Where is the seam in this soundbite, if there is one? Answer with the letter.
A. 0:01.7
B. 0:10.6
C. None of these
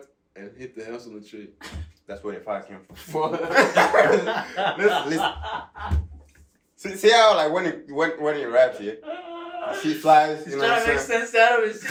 C